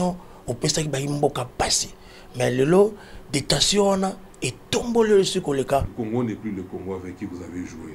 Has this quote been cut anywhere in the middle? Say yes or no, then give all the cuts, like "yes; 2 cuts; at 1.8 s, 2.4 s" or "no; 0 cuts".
yes; 1 cut; at 5.9 s